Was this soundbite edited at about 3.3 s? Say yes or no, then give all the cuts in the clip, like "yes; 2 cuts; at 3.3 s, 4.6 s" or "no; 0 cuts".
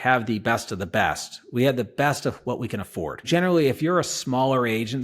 yes; 1 cut; at 3.3 s